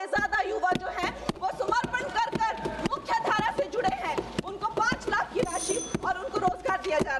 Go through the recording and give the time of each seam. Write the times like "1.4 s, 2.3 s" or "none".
none